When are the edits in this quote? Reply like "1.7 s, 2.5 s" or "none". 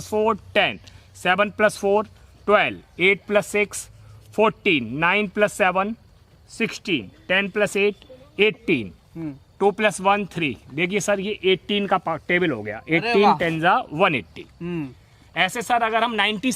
none